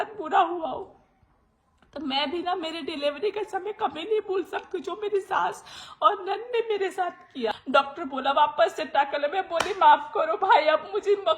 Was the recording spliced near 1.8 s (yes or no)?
no